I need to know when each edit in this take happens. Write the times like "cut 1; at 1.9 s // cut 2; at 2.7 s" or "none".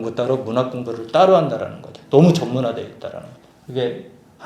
none